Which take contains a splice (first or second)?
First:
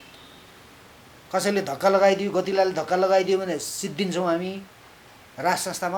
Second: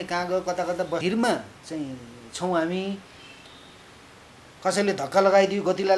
second